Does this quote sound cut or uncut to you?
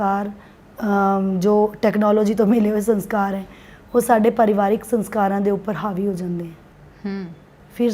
uncut